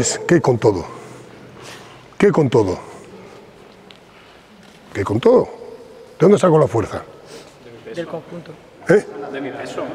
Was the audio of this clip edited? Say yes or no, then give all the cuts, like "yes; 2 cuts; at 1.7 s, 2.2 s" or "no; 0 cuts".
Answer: no; 0 cuts